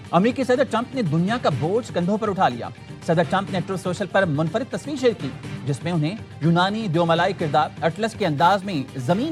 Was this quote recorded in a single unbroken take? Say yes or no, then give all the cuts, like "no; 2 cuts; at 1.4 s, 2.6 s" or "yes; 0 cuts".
yes; 0 cuts